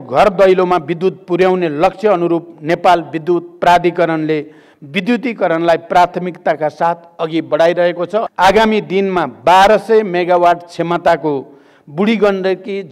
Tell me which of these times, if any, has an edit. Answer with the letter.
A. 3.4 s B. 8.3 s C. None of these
B